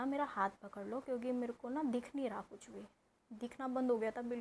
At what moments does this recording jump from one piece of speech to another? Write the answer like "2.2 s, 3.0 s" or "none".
none